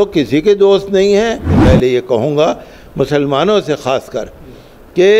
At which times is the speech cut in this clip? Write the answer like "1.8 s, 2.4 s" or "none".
1.6 s